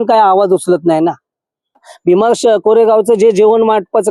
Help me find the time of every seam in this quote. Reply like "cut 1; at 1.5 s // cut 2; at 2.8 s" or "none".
cut 1; at 1.9 s